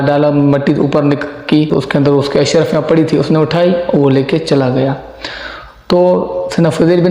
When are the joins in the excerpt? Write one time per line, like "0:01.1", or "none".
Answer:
0:01.7